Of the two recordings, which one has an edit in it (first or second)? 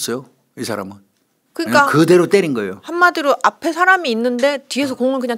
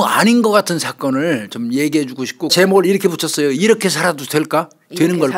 second